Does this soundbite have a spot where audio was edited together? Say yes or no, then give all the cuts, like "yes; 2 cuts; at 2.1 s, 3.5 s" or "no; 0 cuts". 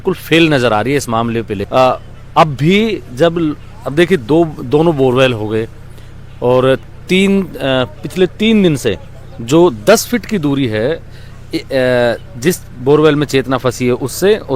no; 0 cuts